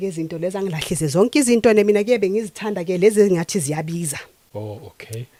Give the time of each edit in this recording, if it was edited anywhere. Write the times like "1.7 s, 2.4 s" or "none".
none